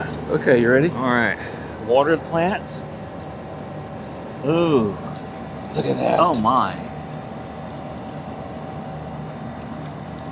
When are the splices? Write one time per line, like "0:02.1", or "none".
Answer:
none